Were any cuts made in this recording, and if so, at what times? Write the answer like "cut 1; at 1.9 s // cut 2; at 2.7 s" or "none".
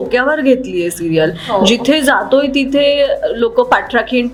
none